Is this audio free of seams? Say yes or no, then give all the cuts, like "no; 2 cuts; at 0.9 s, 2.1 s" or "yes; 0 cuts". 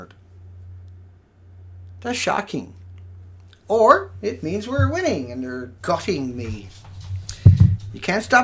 yes; 0 cuts